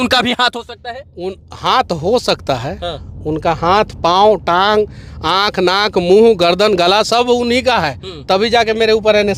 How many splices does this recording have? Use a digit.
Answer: 0